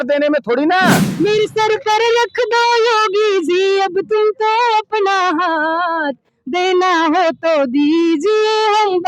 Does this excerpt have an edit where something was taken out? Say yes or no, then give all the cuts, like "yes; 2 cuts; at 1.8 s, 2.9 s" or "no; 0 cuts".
yes; 1 cut; at 1.0 s